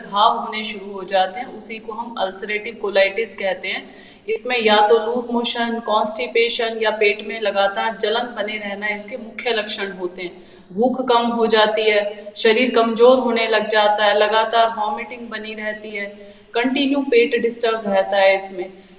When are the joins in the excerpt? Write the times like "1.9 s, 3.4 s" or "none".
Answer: none